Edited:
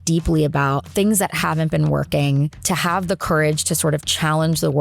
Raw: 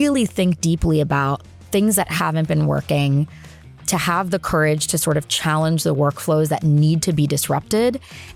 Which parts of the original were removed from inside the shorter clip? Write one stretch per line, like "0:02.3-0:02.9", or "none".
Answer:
0:01.4-0:01.6
0:03.3-0:03.8